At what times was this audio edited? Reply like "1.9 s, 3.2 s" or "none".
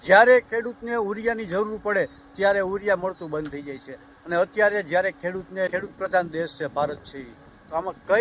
5.7 s